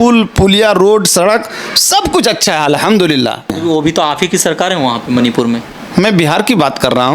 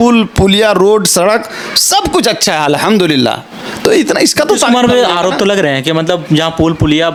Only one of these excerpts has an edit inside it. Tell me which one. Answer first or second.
first